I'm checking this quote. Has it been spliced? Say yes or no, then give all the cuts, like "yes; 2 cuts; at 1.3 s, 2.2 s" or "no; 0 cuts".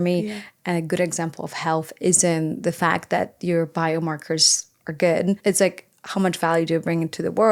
no; 0 cuts